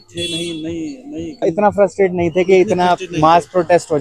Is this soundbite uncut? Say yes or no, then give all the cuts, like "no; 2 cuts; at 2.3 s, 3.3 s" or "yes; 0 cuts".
no; 1 cut; at 1.4 s